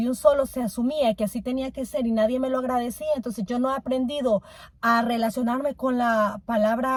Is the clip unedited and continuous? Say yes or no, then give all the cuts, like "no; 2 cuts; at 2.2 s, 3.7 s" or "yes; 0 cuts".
yes; 0 cuts